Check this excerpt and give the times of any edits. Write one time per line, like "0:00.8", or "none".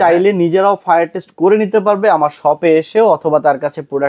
none